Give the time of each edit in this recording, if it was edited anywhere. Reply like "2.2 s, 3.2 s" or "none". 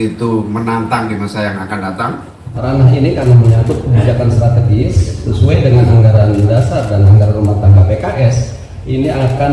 2.5 s